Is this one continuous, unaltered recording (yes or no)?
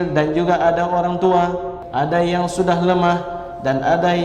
no